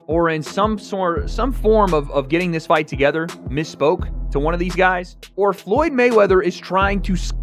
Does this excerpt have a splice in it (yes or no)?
no